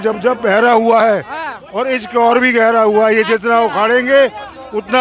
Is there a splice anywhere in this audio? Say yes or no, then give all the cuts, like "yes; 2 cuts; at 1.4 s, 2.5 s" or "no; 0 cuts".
no; 0 cuts